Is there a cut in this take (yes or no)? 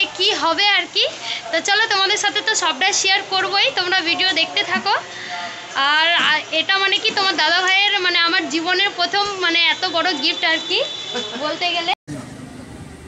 no